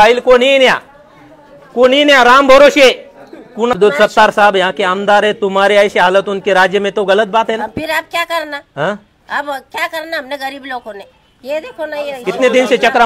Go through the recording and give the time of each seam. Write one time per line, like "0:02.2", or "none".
0:03.8